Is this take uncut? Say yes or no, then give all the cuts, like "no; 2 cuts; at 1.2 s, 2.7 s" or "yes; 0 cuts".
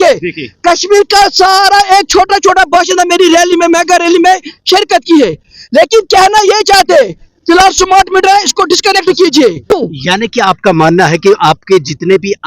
no; 1 cut; at 9.7 s